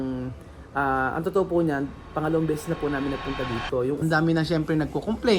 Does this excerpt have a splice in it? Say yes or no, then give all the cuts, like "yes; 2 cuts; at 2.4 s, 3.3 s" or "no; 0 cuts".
yes; 1 cut; at 4.0 s